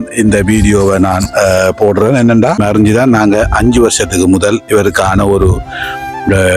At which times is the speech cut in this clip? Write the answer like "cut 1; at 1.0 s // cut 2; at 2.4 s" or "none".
cut 1; at 2.6 s